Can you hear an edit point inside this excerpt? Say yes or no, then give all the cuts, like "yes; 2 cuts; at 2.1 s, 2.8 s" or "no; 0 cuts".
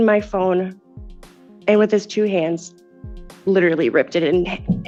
no; 0 cuts